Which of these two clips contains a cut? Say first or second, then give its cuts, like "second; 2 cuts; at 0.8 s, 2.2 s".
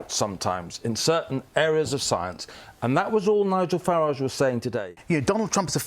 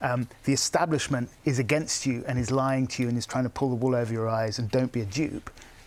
first; 1 cut; at 4.9 s